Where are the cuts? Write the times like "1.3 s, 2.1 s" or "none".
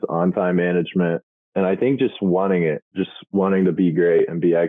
1.3 s, 2.9 s